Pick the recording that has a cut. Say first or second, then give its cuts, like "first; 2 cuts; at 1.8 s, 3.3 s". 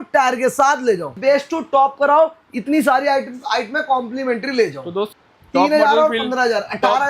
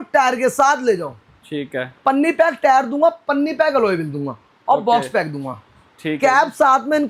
first; 2 cuts; at 1.2 s, 5.1 s